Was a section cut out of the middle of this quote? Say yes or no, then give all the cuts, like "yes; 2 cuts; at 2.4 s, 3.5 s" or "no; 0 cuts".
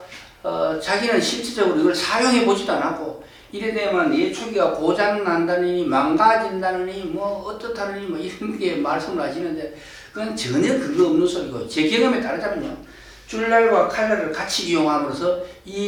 no; 0 cuts